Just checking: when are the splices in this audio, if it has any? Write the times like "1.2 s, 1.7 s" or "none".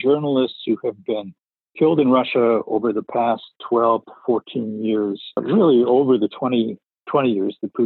5.4 s, 7.0 s